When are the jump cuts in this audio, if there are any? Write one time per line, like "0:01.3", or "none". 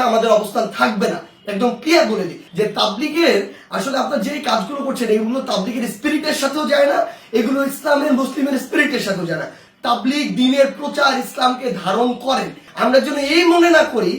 0:02.4
0:09.6
0:12.6